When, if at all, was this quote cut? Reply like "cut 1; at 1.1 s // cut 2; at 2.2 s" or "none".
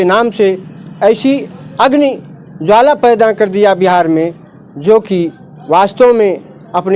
none